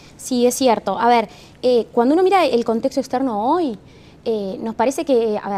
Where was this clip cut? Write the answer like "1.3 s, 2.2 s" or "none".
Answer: none